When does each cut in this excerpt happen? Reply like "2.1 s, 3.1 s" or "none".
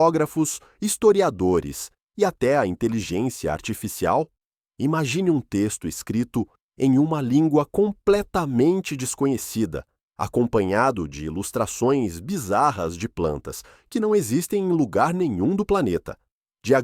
none